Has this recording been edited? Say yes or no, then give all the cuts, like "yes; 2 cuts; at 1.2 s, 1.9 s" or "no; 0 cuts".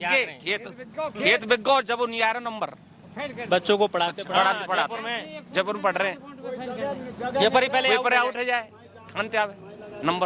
no; 0 cuts